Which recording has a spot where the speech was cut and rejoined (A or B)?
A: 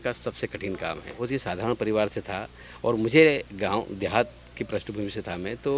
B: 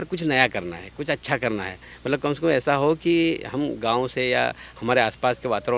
A